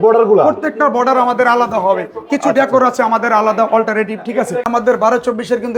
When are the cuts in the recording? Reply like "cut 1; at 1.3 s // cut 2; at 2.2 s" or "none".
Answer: cut 1; at 4.6 s